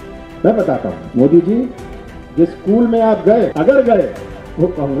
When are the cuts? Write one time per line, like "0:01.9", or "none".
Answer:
0:01.0
0:03.5